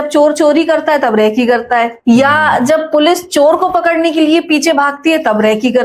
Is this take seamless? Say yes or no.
yes